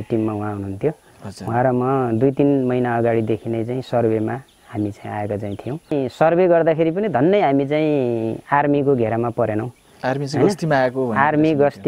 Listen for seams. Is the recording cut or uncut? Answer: cut